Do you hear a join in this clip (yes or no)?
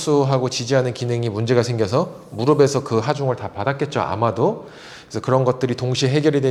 no